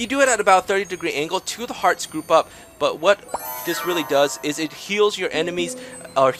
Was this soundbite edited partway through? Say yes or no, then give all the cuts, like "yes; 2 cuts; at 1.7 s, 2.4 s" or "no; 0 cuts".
no; 0 cuts